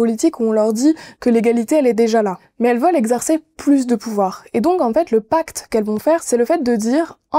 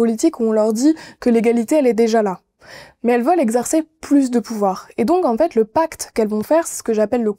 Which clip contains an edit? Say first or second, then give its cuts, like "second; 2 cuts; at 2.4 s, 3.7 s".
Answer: first; 2 cuts; at 2.4 s, 6.2 s